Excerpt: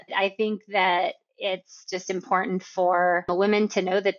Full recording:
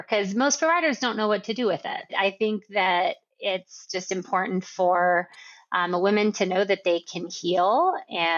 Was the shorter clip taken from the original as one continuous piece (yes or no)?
no